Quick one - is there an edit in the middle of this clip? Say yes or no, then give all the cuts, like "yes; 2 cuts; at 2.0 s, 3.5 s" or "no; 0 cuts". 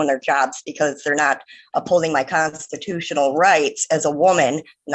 no; 0 cuts